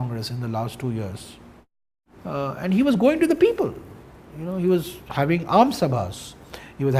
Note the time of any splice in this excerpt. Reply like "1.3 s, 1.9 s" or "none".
3.7 s